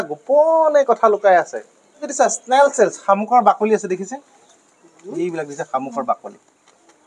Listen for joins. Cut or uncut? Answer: cut